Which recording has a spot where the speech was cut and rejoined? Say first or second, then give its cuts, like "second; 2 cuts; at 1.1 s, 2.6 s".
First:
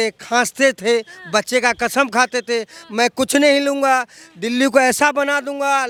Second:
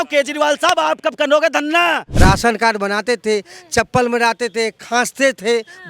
second; 1 cut; at 2.1 s